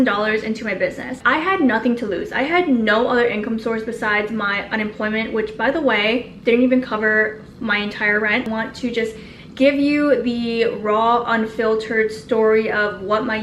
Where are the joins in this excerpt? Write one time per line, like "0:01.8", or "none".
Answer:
0:01.2
0:08.5